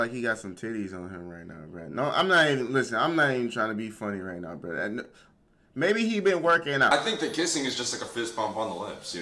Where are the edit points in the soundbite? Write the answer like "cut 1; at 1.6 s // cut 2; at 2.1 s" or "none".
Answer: cut 1; at 6.9 s